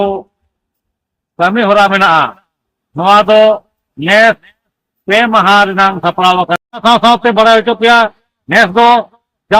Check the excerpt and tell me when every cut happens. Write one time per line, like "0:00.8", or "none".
0:06.8